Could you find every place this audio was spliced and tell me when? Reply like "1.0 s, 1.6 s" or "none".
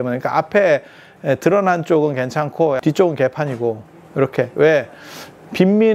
2.8 s